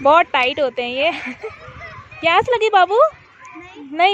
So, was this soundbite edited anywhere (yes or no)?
no